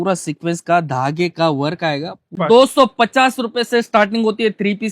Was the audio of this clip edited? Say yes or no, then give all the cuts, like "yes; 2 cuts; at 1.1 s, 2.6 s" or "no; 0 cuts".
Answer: yes; 1 cut; at 2.4 s